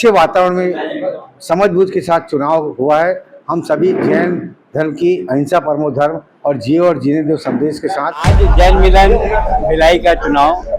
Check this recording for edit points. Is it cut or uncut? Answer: cut